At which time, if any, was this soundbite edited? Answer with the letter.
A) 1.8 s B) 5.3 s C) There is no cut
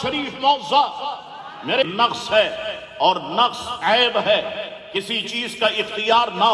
A